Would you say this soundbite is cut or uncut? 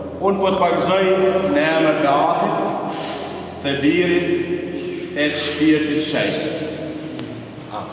uncut